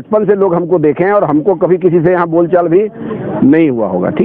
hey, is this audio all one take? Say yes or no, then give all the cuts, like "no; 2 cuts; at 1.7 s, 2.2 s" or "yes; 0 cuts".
yes; 0 cuts